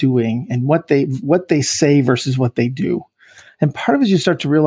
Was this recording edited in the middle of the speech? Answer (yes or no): no